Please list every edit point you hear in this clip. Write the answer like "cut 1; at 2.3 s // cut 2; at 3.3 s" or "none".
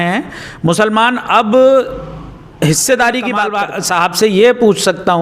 cut 1; at 3.4 s